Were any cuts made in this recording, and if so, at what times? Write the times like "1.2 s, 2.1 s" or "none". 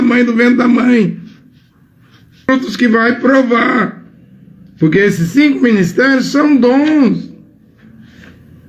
2.5 s